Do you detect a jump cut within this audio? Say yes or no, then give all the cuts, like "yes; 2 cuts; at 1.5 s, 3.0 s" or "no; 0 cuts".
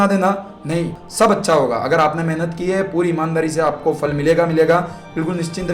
yes; 1 cut; at 1.0 s